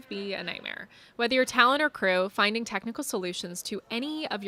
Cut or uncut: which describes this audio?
uncut